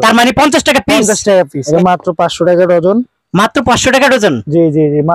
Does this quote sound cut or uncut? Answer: cut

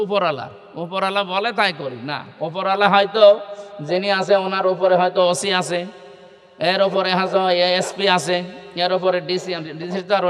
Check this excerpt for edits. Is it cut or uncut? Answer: uncut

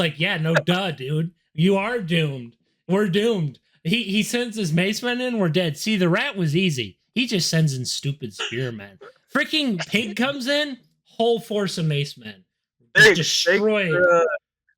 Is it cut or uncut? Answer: uncut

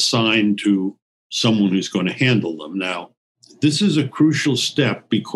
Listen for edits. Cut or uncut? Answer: cut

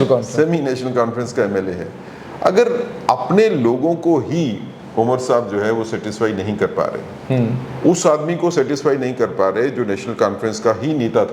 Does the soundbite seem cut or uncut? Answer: uncut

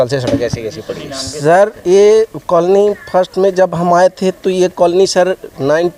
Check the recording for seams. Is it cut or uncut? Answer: uncut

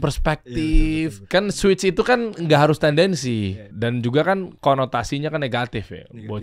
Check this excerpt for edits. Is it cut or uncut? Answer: cut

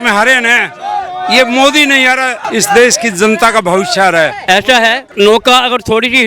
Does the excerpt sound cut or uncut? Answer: cut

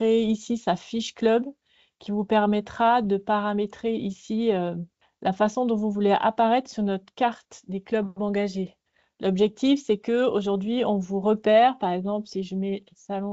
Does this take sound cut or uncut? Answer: uncut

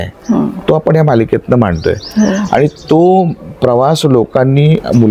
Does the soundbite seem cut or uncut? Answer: uncut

